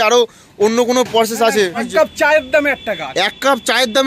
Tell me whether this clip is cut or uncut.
cut